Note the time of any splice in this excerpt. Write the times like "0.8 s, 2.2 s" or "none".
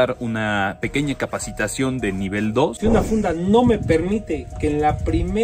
2.7 s